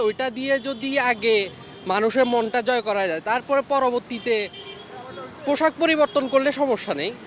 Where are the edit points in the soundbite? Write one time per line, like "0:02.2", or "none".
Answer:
none